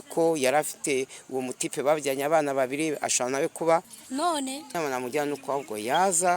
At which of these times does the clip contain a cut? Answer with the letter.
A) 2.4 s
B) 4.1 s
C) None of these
B